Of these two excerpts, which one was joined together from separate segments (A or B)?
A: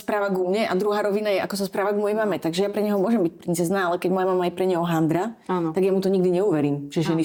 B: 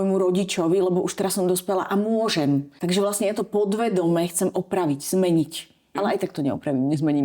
B